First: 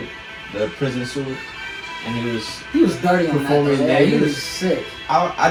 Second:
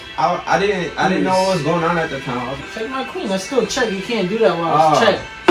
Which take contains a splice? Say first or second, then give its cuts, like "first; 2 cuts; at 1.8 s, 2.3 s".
second; 1 cut; at 2.6 s